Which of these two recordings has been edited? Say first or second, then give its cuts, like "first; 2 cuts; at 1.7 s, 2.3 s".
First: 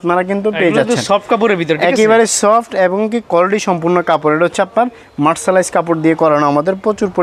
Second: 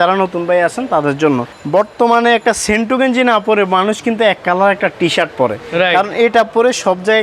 second; 1 cut; at 1.5 s